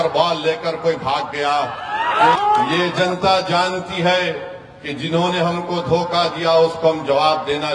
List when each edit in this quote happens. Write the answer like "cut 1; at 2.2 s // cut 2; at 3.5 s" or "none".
cut 1; at 2.4 s

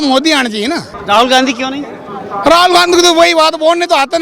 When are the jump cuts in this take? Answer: cut 1; at 0.9 s

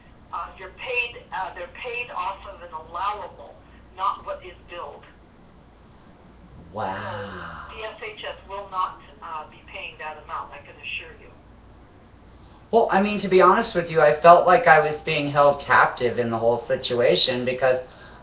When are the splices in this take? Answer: cut 1; at 10.9 s

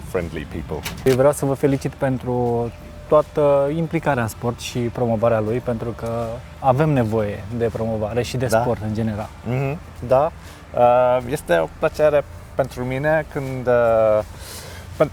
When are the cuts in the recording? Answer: cut 1; at 1.1 s

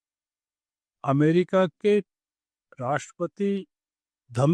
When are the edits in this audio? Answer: none

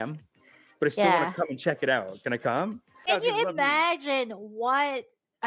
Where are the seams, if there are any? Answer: cut 1; at 2.9 s

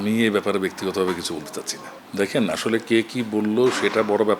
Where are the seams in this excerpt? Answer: none

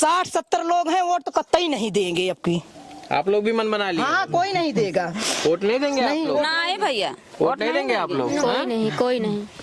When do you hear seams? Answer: none

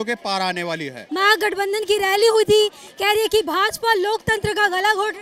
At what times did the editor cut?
cut 1; at 1.0 s

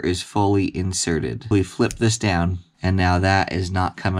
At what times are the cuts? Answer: cut 1; at 1.5 s // cut 2; at 2.7 s

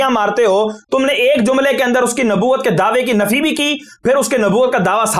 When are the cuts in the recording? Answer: none

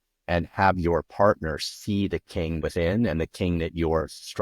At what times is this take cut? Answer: cut 1; at 2.6 s

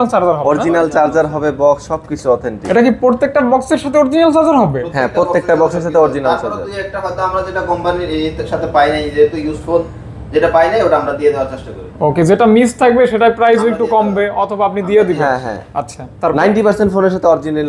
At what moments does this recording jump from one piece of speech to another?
none

